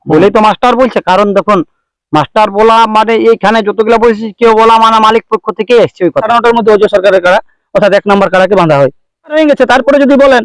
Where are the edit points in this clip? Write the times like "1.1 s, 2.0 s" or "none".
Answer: 6.2 s, 9.4 s